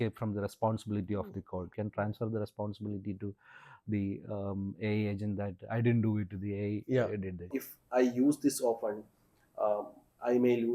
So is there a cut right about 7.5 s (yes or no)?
yes